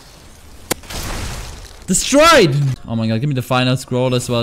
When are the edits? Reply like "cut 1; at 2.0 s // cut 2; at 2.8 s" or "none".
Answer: cut 1; at 2.8 s